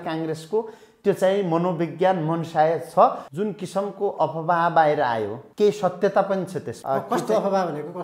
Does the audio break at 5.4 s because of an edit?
yes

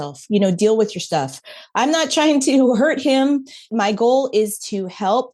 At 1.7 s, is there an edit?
no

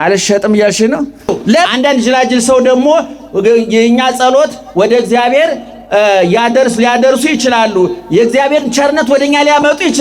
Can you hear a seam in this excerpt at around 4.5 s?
no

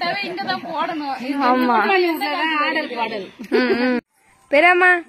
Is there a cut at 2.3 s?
no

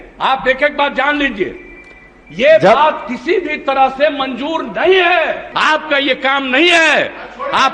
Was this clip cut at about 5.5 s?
yes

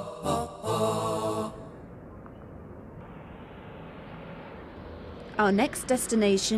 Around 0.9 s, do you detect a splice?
yes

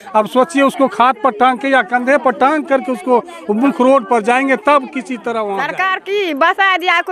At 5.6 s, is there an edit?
yes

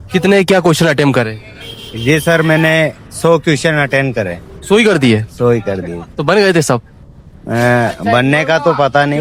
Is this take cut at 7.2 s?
no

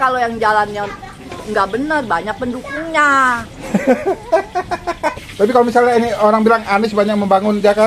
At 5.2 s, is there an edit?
yes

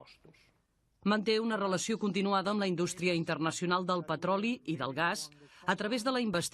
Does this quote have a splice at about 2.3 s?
yes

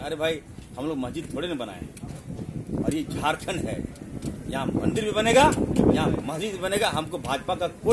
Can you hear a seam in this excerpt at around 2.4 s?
no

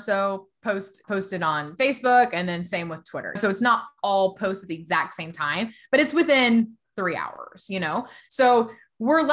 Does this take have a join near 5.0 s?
no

